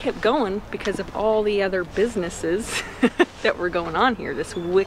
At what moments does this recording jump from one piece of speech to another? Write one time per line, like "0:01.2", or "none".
none